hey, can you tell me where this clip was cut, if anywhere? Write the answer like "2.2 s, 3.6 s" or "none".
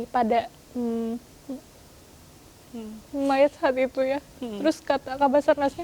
none

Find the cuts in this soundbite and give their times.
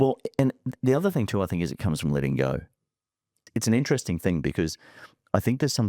3.5 s

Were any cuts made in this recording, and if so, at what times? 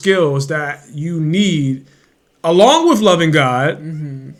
none

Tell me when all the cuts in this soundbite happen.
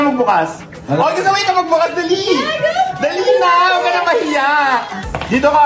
none

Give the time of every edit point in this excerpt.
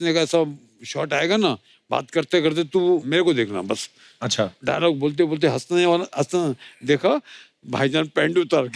3.1 s, 4.6 s

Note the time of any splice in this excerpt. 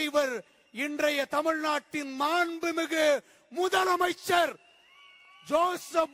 none

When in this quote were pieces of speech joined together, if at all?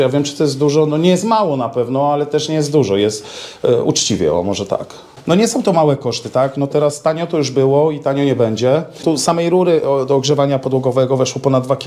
5.1 s, 9.0 s

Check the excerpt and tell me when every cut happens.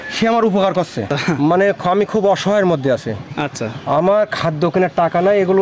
1.1 s

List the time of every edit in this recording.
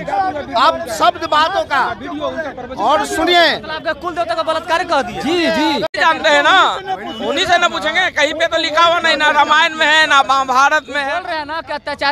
5.9 s

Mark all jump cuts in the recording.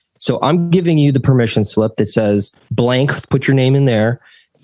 2.6 s

